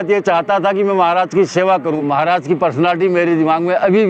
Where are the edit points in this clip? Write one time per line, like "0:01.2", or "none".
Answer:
0:02.0